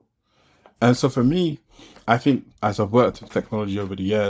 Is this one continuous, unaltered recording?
no; 1 cut; at 2.5 s

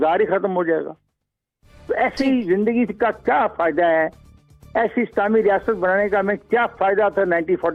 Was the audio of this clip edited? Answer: no; 0 cuts

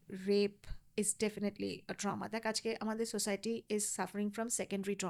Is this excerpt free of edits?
yes; 0 cuts

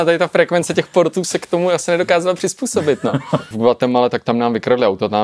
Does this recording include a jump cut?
yes; 1 cut; at 3.5 s

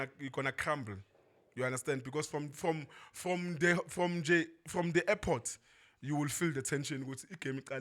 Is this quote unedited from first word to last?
yes; 0 cuts

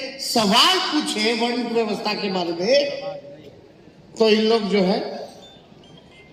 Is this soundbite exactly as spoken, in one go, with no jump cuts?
yes; 0 cuts

